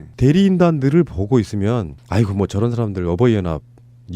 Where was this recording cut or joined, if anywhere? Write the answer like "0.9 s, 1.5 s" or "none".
2.4 s